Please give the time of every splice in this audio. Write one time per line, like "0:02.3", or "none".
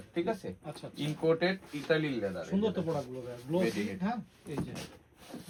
none